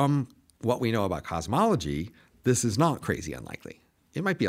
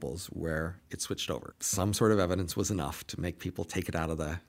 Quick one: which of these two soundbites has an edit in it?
second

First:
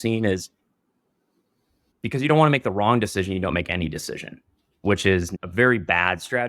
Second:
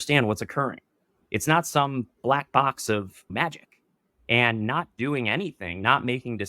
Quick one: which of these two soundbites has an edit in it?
first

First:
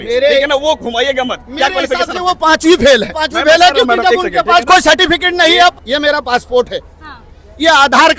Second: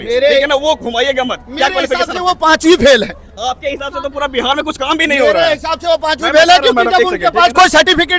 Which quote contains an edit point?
first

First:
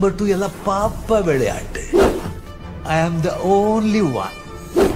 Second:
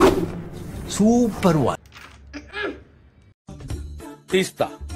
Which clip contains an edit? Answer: second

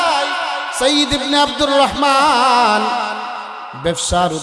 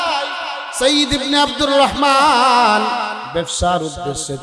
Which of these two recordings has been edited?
second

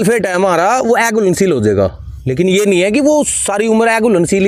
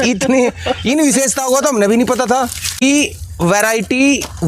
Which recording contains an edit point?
second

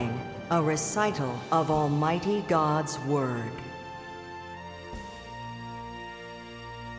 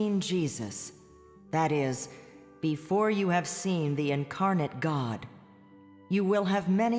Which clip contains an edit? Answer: second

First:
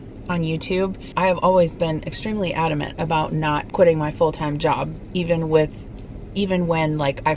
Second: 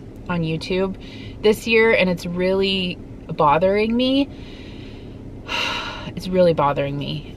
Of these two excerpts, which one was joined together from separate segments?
first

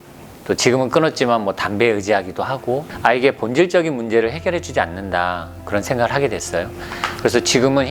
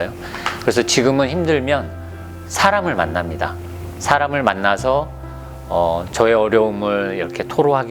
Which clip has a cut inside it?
first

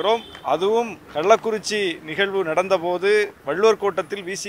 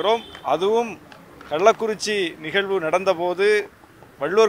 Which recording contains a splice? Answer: first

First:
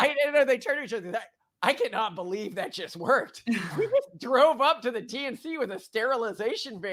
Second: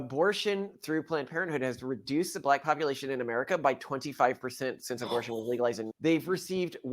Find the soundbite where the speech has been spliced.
second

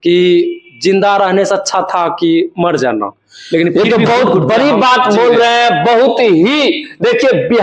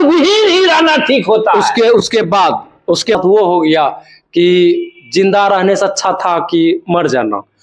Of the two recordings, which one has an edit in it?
second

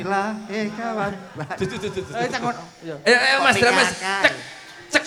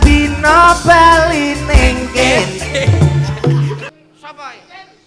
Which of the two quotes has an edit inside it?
second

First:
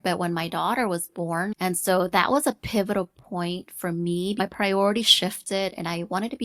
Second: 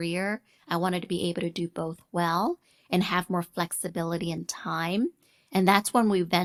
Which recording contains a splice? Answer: first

